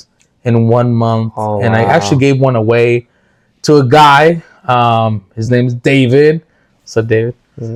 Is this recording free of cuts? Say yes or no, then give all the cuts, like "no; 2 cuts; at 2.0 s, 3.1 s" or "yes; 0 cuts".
yes; 0 cuts